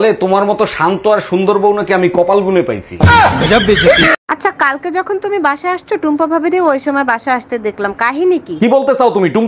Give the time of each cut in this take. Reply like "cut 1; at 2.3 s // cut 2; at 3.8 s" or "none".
cut 1; at 4.2 s